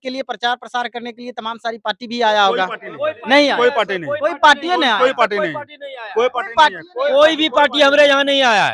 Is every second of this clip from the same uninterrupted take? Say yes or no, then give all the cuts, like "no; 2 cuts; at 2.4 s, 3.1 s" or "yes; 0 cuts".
yes; 0 cuts